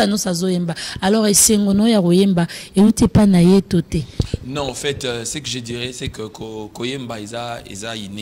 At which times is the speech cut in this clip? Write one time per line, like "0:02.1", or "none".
none